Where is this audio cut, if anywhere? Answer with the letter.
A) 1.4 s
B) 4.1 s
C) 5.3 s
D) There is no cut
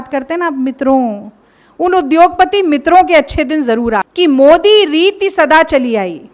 B